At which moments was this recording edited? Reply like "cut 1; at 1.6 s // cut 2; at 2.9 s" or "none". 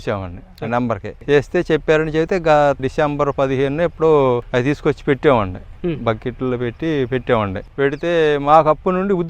cut 1; at 1.1 s // cut 2; at 2.8 s // cut 3; at 4.4 s // cut 4; at 7.6 s